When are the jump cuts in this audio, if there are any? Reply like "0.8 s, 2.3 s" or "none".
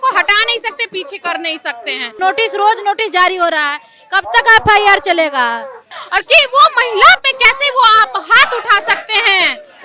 2.1 s, 5.9 s